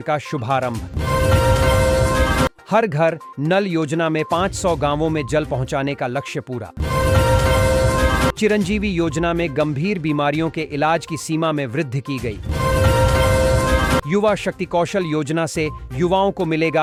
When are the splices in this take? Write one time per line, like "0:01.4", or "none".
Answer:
none

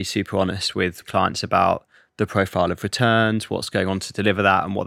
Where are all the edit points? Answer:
0:01.0
0:03.7

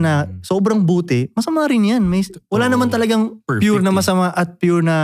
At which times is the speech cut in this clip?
none

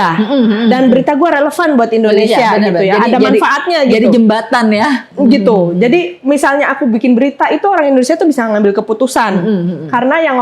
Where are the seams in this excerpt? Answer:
none

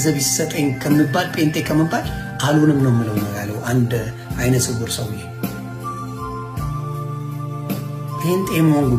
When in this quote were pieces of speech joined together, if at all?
none

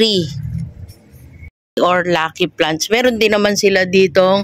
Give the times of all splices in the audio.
0:01.8

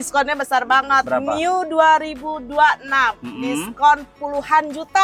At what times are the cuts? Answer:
none

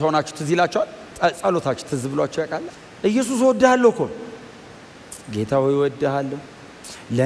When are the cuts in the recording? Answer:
0:01.0
0:02.6

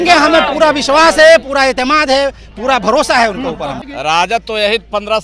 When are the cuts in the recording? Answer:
0:03.9

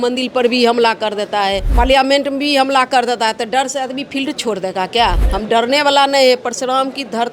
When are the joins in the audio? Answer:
0:01.6
0:05.2

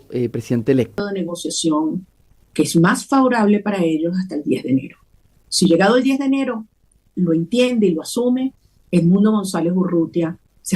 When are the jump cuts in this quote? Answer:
0:01.0

